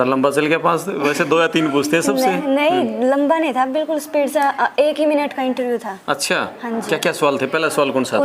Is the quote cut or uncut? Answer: cut